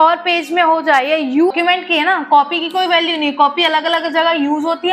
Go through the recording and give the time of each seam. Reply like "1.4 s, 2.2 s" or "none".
1.5 s